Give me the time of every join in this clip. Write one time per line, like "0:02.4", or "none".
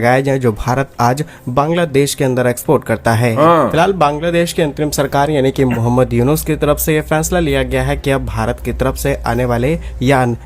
0:03.5